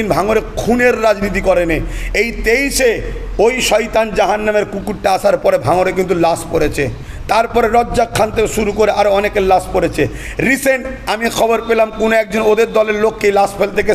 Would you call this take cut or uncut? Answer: uncut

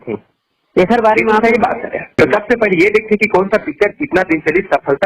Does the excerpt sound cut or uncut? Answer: cut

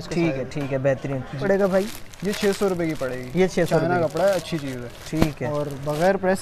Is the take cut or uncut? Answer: cut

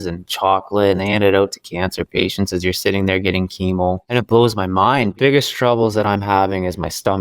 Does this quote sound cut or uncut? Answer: cut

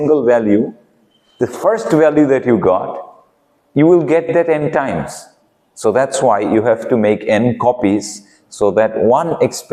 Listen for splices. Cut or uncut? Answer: uncut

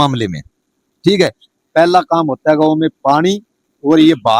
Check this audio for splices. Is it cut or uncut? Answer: uncut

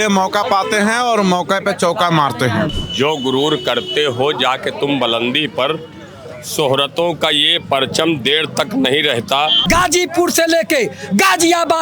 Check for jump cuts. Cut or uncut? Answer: cut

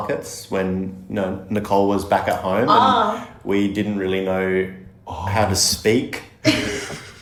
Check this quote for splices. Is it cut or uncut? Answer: uncut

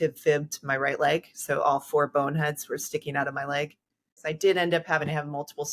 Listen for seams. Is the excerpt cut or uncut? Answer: cut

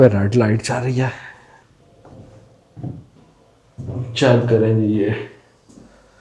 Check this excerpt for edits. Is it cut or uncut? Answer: uncut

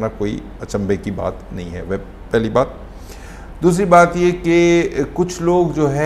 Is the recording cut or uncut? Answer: uncut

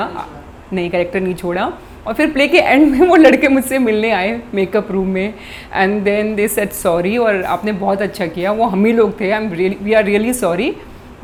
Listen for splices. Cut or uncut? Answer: uncut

